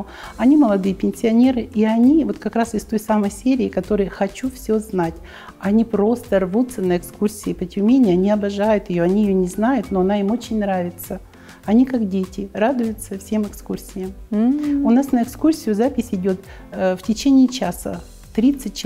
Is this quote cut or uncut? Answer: uncut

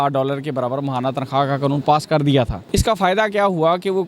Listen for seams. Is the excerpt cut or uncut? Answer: cut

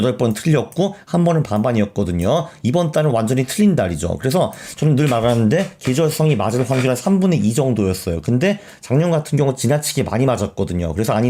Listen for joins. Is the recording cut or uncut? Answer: uncut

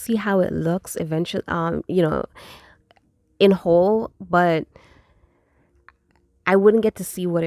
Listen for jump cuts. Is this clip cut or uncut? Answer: uncut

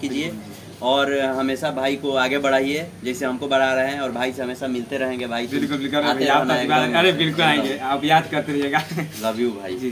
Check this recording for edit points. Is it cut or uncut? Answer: uncut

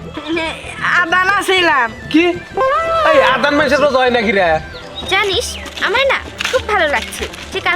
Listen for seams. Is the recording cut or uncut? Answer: cut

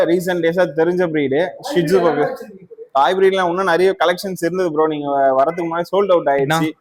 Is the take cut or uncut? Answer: uncut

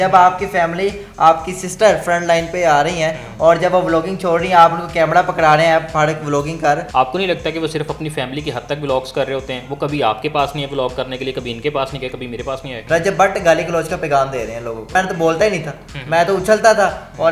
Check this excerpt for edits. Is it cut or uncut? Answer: cut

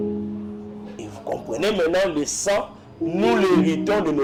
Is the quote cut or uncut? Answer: uncut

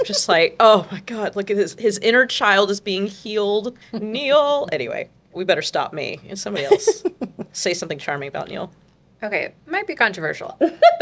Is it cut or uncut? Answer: cut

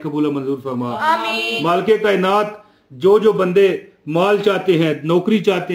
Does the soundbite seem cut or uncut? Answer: uncut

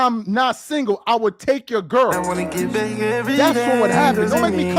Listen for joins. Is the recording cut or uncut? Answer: uncut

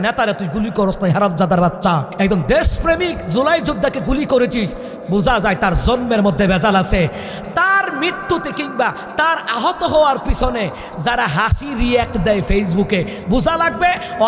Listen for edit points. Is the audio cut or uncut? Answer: cut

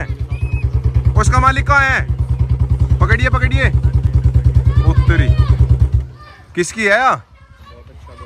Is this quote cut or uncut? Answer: uncut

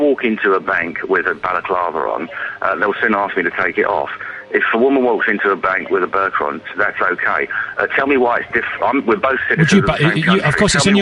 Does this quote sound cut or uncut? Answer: cut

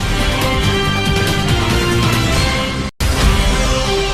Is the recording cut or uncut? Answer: cut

